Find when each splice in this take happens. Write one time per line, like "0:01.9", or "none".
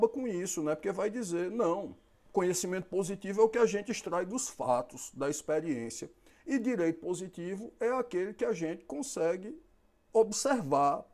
none